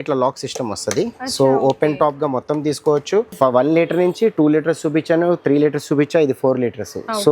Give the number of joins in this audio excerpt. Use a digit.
1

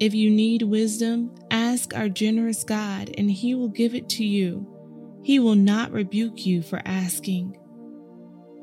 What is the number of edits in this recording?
1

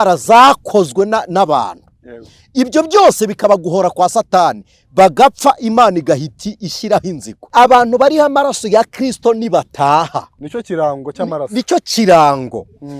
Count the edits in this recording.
1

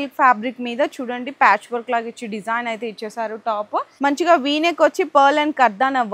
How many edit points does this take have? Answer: 1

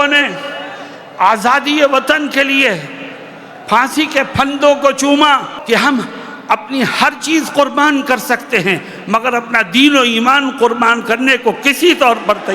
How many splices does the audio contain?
1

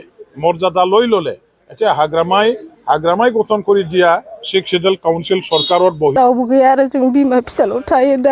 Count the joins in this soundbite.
1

